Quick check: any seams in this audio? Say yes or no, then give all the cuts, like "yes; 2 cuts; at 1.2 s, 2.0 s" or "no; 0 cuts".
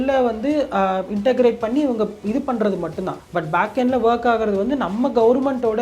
yes; 1 cut; at 3.2 s